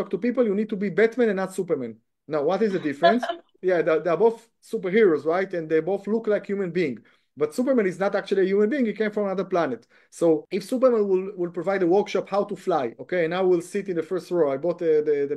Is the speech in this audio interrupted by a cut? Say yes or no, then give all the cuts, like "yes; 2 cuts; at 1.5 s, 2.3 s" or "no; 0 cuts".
yes; 2 cuts; at 3.6 s, 10.4 s